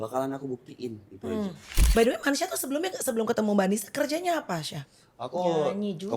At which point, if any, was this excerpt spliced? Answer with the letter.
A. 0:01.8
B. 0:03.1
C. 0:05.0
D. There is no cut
A